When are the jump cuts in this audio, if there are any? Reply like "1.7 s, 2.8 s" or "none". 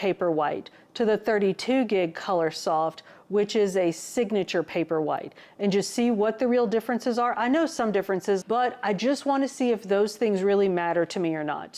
8.4 s